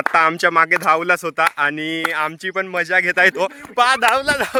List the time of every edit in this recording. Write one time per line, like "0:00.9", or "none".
none